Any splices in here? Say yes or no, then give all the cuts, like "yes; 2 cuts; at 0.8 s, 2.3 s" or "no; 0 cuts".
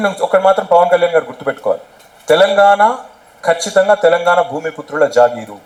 no; 0 cuts